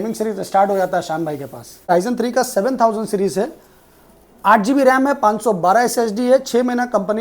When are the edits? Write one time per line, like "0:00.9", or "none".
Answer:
0:01.9